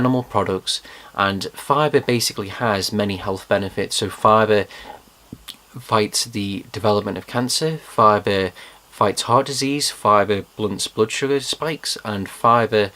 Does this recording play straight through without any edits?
no; 1 cut; at 7.2 s

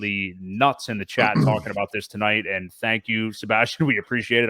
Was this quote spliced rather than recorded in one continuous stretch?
no; 0 cuts

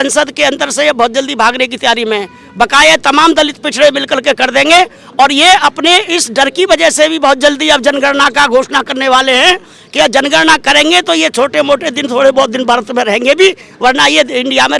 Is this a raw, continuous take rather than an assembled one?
yes; 0 cuts

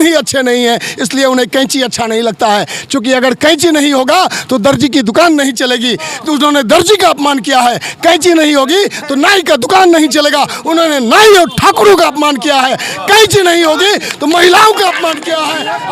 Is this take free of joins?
yes; 0 cuts

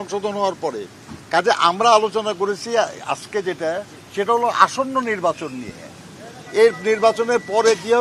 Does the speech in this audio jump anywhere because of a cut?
no; 0 cuts

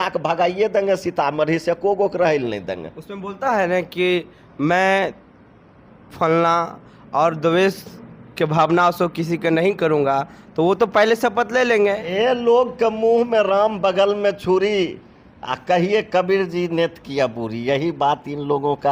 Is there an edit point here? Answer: no; 0 cuts

